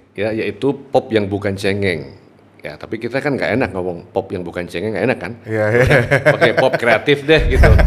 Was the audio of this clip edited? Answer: no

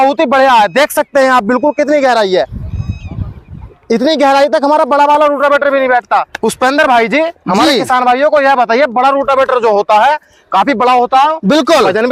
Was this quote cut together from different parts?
no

